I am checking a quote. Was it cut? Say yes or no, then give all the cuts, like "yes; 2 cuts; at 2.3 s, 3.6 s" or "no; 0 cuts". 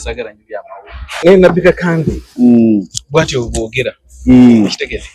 yes; 1 cut; at 1.1 s